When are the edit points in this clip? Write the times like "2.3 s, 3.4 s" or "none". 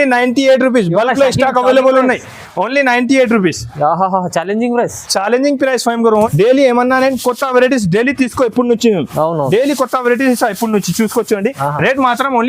6.3 s